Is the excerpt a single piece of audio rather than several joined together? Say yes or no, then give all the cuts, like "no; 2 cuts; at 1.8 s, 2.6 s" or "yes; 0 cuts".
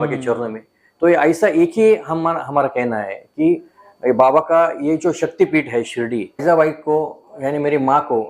no; 1 cut; at 6.4 s